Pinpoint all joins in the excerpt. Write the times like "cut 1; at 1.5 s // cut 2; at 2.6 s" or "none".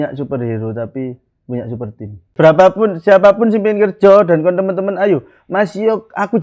cut 1; at 2.2 s